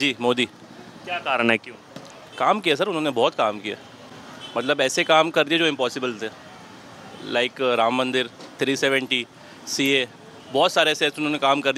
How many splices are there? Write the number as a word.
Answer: zero